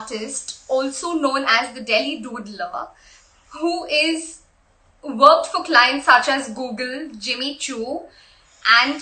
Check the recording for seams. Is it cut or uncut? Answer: uncut